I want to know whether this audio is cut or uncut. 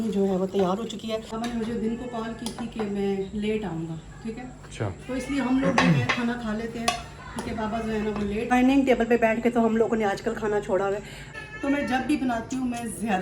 cut